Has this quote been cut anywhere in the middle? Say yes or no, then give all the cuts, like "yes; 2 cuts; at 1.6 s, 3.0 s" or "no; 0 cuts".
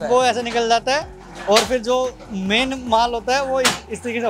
no; 0 cuts